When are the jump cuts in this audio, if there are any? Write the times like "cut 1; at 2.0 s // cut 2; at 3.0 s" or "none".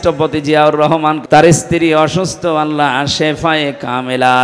cut 1; at 1.2 s